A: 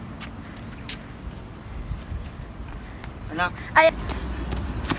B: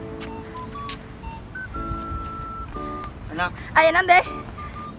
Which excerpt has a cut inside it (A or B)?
A